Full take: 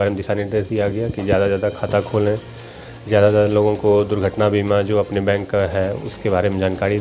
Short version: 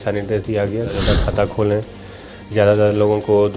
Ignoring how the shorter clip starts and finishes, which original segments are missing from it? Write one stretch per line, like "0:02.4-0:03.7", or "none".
0:01.2-0:01.5